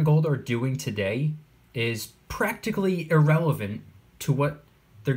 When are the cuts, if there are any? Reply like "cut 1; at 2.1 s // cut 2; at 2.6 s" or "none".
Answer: none